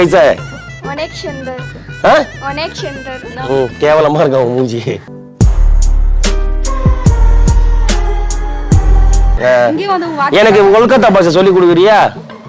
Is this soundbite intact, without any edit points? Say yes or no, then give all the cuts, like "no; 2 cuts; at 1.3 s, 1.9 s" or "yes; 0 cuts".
no; 1 cut; at 9.3 s